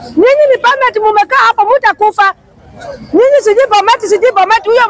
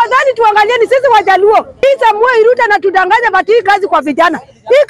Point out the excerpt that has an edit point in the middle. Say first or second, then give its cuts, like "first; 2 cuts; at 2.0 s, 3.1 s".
second; 1 cut; at 1.8 s